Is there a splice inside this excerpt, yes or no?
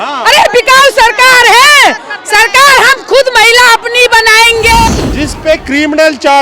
yes